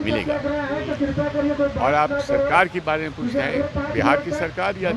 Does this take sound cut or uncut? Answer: uncut